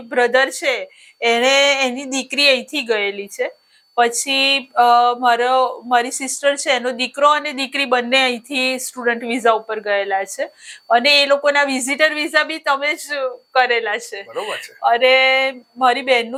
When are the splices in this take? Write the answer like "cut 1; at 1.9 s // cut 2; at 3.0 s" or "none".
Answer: none